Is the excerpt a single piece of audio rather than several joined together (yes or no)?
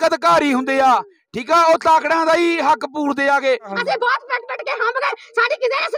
no